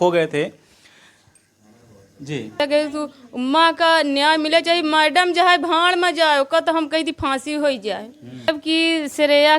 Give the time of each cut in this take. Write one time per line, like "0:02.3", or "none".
0:02.6
0:08.6